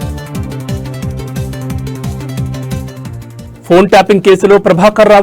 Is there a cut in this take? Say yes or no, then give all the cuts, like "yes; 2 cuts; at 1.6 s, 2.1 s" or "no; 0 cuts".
yes; 1 cut; at 3.2 s